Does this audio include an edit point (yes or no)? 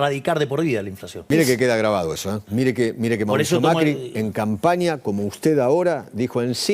yes